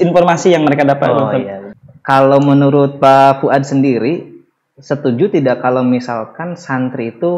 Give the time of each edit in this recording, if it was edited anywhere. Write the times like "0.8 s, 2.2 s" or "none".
1.7 s